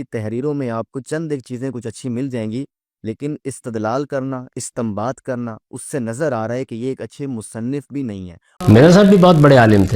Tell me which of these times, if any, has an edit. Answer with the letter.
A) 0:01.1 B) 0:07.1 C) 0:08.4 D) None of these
C